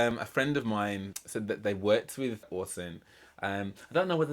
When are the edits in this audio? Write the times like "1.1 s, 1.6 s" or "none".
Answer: 1.1 s, 2.4 s